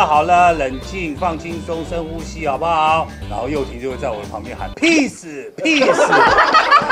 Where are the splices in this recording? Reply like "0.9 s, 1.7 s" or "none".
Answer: none